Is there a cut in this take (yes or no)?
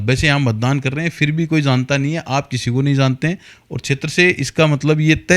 no